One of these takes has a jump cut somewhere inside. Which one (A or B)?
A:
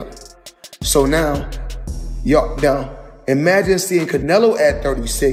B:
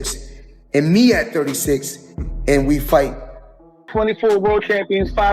B